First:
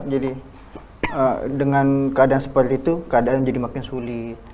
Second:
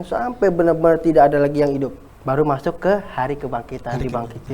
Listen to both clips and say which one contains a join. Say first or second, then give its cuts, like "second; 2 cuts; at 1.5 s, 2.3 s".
second; 1 cut; at 2.1 s